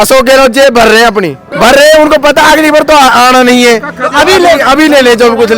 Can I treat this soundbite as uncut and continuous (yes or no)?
no